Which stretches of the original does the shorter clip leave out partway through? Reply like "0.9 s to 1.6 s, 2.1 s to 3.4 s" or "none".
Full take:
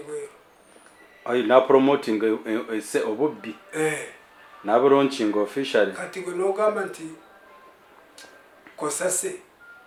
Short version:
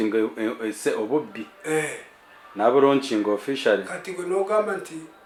none